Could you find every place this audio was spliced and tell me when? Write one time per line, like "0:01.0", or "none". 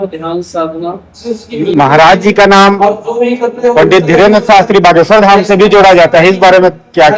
0:01.2